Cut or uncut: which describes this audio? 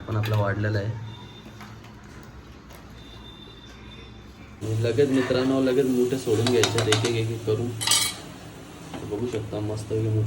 cut